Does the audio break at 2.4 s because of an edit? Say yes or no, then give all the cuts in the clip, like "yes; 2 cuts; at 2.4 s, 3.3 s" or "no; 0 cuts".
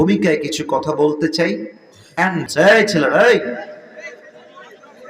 yes; 1 cut; at 2.4 s